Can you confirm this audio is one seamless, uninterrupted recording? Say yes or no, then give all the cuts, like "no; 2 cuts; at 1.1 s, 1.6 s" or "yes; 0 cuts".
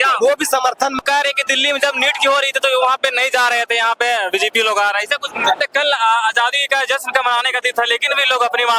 no; 2 cuts; at 1.0 s, 5.6 s